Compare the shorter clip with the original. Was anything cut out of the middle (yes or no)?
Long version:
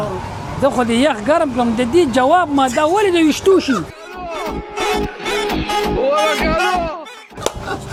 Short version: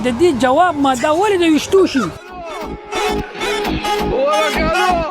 yes